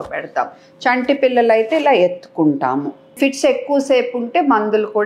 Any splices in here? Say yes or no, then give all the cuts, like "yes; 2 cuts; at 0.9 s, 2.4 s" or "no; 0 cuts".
yes; 1 cut; at 3.2 s